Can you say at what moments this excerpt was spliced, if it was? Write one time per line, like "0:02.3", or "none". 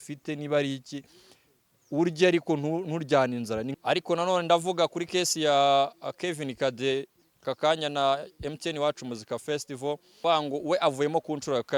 0:03.7
0:10.2